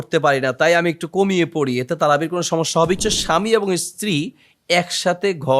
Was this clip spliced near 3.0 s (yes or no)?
yes